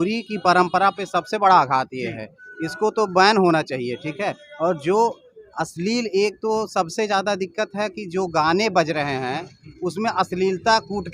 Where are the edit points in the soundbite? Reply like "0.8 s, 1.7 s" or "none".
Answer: none